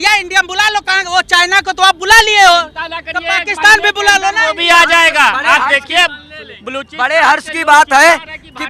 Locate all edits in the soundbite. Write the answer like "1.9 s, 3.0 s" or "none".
none